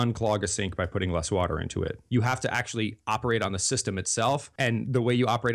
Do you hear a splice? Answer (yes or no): yes